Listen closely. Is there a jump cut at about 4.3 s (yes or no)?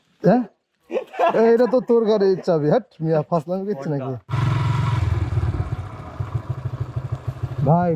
yes